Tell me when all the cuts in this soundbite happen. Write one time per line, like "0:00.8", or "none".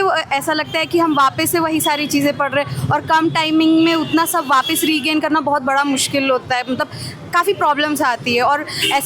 none